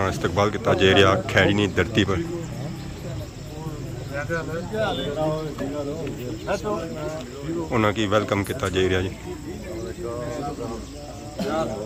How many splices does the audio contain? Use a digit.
0